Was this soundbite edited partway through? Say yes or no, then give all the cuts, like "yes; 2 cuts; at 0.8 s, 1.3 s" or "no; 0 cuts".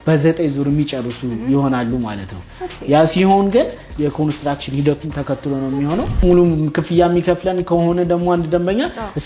yes; 1 cut; at 6.2 s